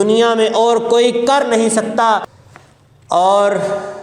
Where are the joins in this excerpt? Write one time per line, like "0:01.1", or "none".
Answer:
0:02.3